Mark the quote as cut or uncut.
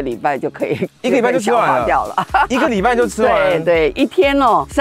uncut